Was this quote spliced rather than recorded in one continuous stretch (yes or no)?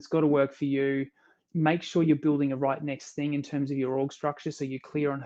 no